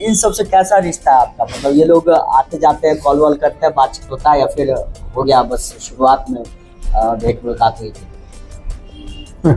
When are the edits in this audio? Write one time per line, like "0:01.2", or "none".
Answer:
none